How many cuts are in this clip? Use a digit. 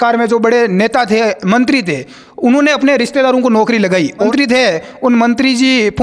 1